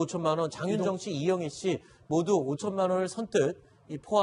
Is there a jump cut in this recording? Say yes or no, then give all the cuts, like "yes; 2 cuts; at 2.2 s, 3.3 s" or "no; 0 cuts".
yes; 1 cut; at 1.2 s